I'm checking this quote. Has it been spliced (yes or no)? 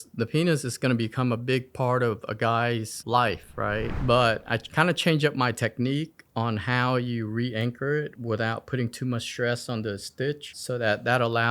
yes